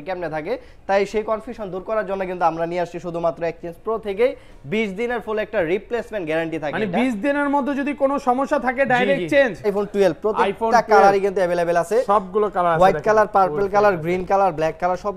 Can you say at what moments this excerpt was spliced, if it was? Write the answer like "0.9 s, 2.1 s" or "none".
9.7 s

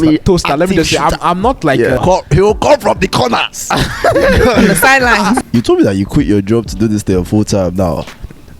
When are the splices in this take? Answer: 2.0 s, 5.4 s

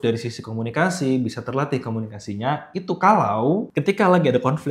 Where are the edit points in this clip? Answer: 3.7 s

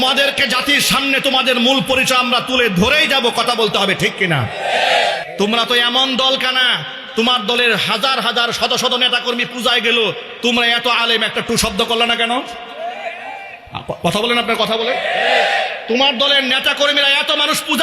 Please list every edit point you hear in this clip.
5.2 s

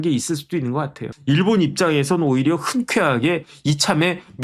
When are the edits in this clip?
1.1 s

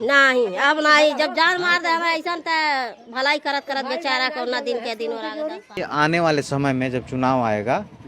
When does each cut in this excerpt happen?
5.8 s

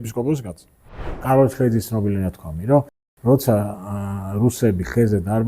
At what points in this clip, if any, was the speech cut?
1.2 s

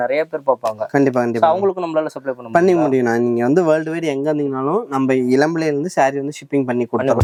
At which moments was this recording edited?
none

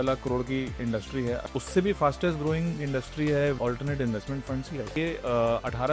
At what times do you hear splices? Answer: 1.4 s, 3.6 s, 4.9 s

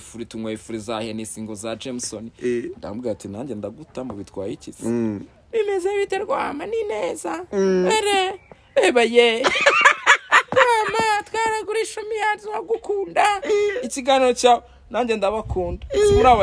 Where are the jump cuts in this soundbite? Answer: none

